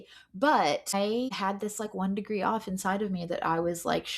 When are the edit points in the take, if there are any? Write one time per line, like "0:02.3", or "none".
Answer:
0:00.9